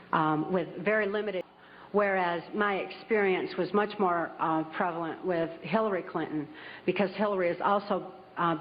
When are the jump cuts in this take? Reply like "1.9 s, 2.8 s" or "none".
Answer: 1.4 s